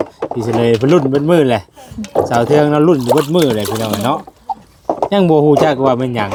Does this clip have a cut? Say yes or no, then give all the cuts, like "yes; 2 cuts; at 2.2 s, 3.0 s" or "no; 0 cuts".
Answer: no; 0 cuts